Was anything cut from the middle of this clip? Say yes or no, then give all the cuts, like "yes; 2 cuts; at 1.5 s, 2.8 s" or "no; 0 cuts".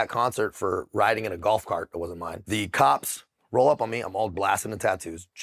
yes; 1 cut; at 2.4 s